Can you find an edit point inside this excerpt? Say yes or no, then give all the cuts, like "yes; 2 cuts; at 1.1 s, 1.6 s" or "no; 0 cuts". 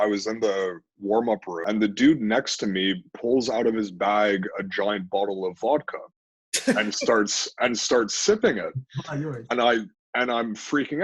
yes; 1 cut; at 1.5 s